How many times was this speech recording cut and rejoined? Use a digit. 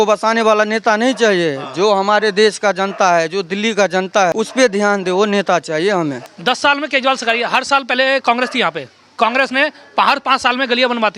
2